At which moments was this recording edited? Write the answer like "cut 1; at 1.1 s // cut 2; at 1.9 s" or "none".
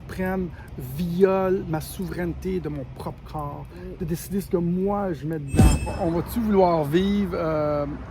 cut 1; at 5.9 s